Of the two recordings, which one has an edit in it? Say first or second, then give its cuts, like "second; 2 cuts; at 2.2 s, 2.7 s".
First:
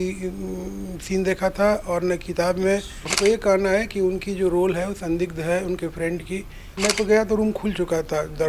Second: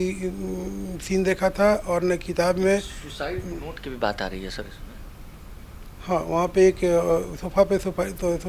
first; 2 cuts; at 3.0 s, 6.8 s